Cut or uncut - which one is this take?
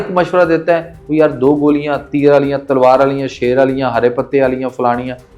uncut